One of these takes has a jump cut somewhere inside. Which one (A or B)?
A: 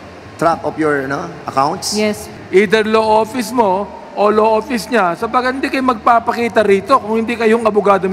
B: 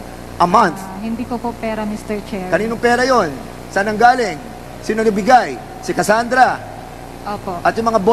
A